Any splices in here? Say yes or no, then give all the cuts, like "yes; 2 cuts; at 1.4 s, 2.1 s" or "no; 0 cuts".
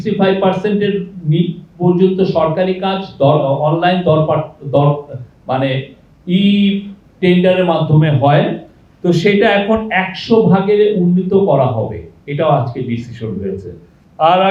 no; 0 cuts